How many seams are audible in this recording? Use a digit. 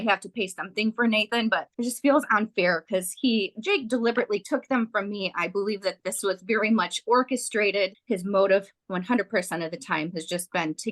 2